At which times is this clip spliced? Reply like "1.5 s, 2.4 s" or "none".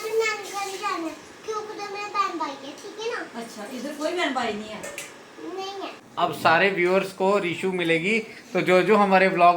6.0 s

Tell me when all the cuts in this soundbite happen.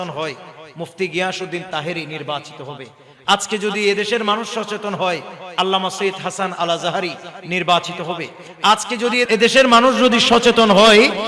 9.3 s

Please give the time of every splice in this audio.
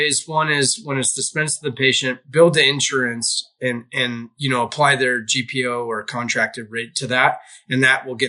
2.2 s

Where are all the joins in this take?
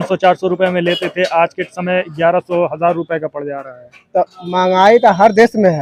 none

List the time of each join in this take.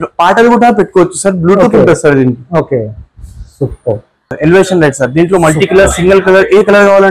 4.3 s

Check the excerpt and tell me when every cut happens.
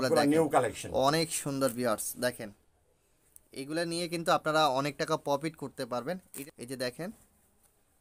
6.3 s

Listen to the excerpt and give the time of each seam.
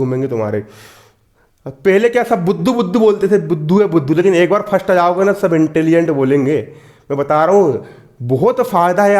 none

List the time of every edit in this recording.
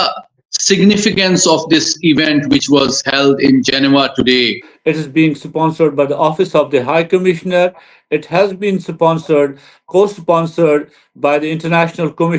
4.6 s

